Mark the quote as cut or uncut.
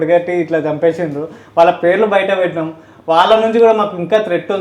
uncut